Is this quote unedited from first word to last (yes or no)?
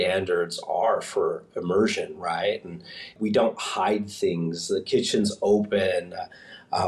yes